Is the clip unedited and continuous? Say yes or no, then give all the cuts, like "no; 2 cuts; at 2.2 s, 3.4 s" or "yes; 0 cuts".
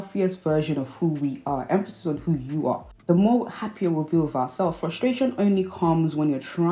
yes; 0 cuts